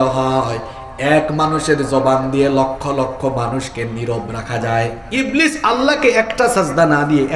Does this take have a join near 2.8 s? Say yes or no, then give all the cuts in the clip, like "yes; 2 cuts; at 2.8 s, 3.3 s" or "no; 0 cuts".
no; 1 cut; at 5.0 s